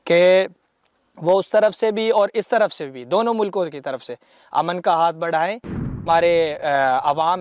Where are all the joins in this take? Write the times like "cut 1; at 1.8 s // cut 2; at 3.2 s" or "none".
cut 1; at 5.9 s

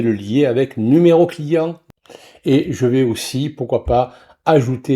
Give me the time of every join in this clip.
cut 1; at 1.8 s

